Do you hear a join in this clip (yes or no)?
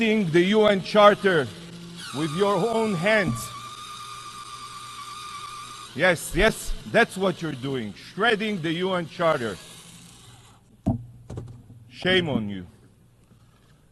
no